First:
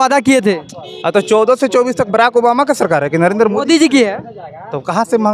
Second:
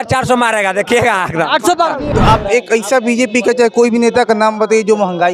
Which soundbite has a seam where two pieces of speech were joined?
second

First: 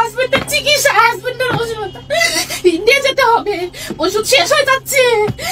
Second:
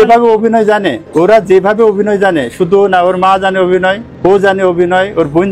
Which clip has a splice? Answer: second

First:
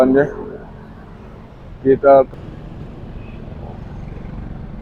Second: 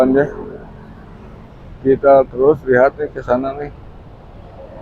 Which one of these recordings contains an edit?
first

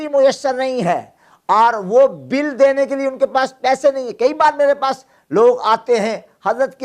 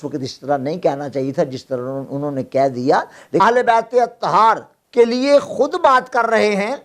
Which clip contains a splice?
second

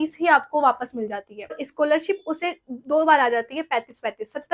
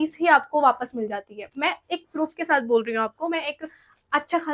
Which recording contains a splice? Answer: first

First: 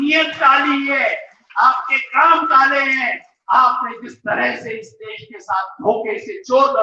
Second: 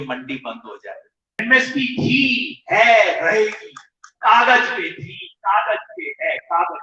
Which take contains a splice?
second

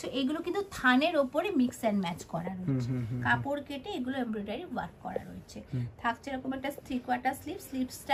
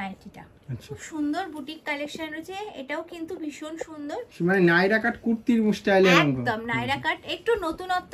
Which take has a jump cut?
second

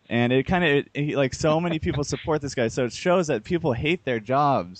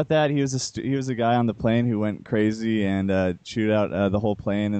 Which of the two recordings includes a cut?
first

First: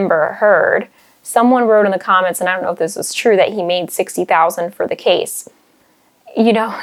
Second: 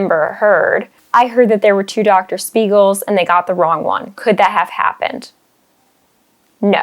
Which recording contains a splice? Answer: second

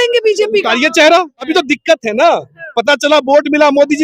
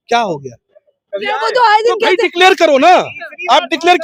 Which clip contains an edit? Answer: first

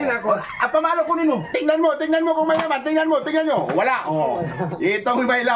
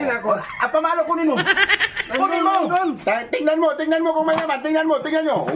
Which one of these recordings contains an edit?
first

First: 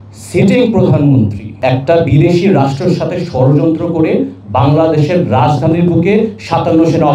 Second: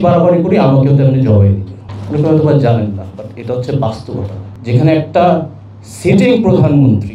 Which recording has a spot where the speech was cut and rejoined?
second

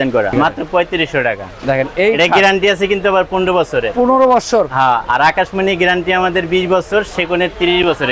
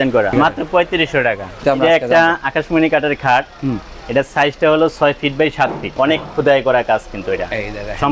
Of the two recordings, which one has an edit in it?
second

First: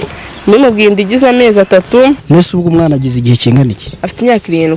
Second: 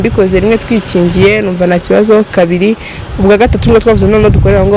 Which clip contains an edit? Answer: first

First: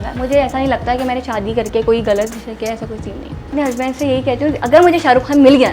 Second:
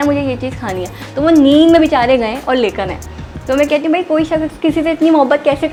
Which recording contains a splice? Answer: first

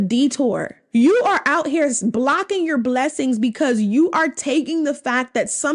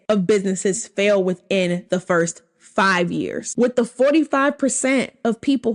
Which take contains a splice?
second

